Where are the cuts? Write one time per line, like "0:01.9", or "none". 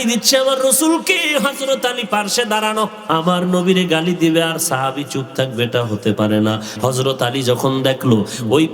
0:03.0
0:06.7